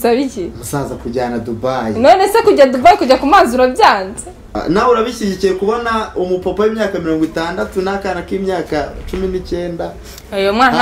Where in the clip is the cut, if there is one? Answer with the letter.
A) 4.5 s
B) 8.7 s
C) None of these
A